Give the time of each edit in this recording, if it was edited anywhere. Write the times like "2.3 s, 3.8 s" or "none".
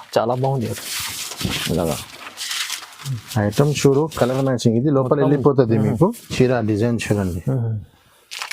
6.3 s